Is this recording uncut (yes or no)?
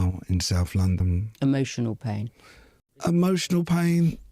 no